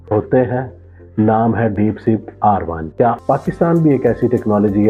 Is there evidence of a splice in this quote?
yes; 1 cut; at 3.2 s

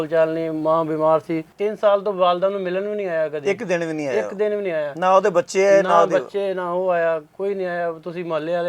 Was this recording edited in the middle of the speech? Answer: yes; 1 cut; at 1.5 s

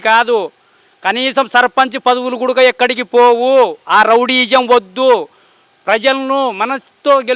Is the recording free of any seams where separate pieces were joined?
yes; 0 cuts

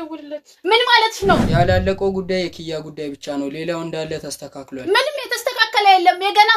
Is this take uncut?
no; 1 cut; at 1.5 s

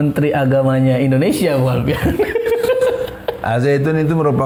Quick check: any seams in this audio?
no; 0 cuts

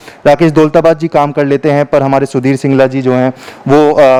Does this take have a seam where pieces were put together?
no; 0 cuts

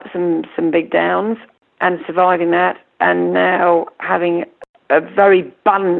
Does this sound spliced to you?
yes; 2 cuts; at 1.5 s, 4.6 s

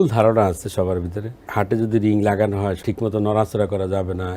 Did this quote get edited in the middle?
yes; 2 cuts; at 1.5 s, 2.8 s

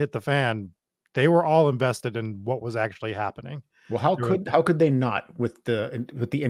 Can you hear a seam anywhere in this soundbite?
no; 0 cuts

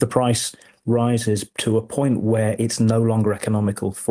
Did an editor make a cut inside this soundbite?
yes; 1 cut; at 1.5 s

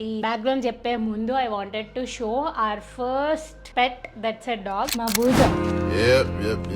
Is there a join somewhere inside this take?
yes; 1 cut; at 4.9 s

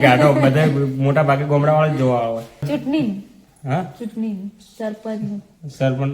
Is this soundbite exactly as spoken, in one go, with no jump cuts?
no; 1 cut; at 2.6 s

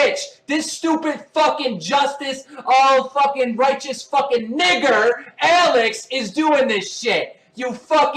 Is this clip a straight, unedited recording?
yes; 0 cuts

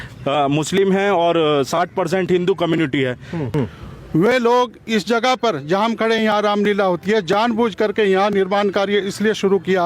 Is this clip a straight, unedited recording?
no; 1 cut; at 3.5 s

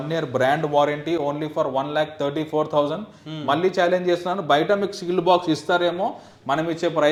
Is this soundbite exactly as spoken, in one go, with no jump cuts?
yes; 0 cuts

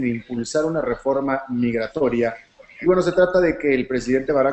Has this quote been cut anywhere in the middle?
no; 0 cuts

